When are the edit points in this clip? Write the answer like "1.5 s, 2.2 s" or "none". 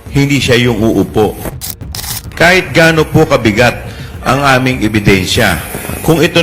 1.7 s